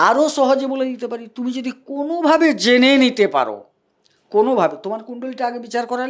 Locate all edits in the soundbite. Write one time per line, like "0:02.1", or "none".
none